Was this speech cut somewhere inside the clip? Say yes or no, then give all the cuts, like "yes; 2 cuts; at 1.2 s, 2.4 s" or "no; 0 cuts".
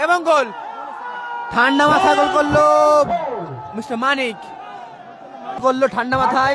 yes; 1 cut; at 5.6 s